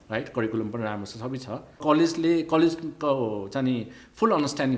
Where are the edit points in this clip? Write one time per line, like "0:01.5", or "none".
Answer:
0:01.8